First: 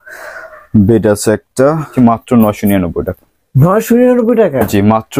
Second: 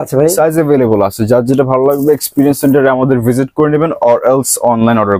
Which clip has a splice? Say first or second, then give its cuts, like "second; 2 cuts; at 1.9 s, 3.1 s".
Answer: first; 1 cut; at 1.9 s